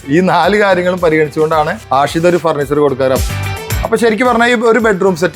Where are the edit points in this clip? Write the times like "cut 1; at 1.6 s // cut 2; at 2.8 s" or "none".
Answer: cut 1; at 1.8 s // cut 2; at 3.3 s